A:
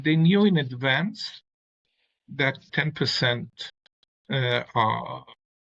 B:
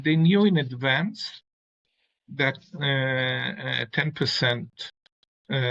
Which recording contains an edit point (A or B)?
A